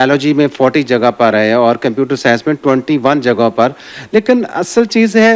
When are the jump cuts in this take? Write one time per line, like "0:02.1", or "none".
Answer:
0:03.9

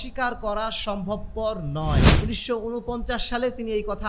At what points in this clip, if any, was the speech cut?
0:02.1

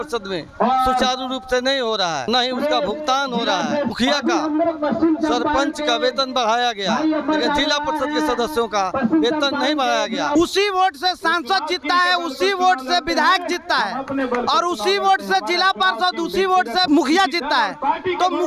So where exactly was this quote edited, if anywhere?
0:02.3
0:03.9
0:10.3
0:16.9

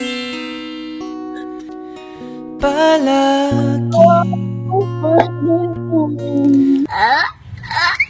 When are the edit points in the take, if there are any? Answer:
none

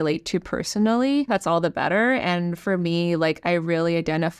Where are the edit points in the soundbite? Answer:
0:01.3

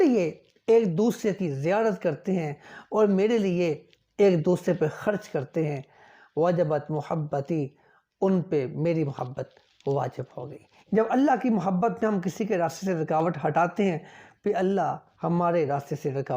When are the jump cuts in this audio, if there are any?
0:10.7
0:15.1

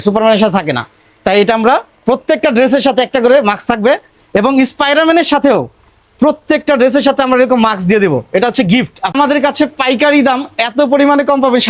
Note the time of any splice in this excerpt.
0:09.1

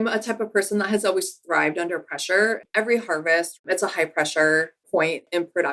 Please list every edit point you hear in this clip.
none

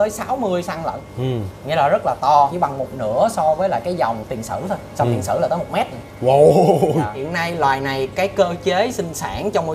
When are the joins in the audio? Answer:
0:02.5
0:04.2
0:07.2

